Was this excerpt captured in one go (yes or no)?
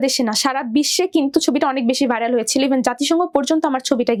yes